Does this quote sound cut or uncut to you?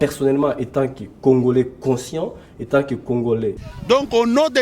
cut